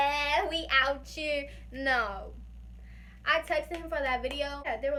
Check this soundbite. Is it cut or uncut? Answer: uncut